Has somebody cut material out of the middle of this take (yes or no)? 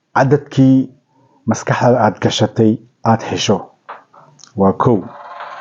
no